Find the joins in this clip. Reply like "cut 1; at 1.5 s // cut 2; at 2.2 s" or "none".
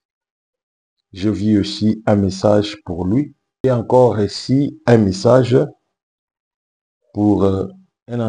cut 1; at 3.6 s

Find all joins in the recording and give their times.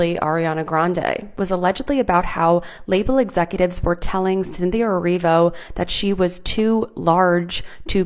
cut 1; at 1.3 s

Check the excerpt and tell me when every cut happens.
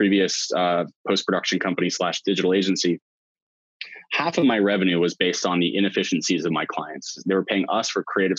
cut 1; at 7.2 s

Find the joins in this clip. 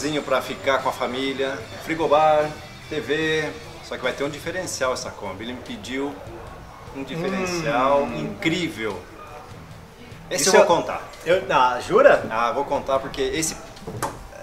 cut 1; at 1.8 s // cut 2; at 3.7 s

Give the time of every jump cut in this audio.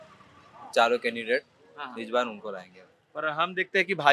none

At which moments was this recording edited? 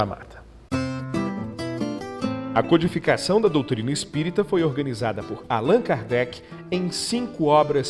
cut 1; at 3.7 s

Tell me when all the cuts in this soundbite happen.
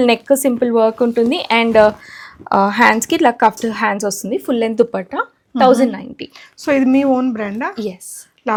none

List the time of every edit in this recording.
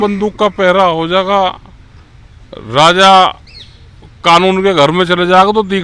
none

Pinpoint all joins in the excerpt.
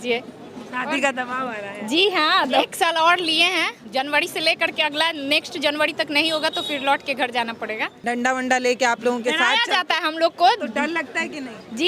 cut 1; at 2.5 s // cut 2; at 3.8 s // cut 3; at 8.0 s

